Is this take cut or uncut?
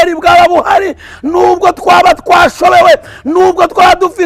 uncut